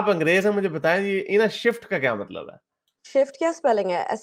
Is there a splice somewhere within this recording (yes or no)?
no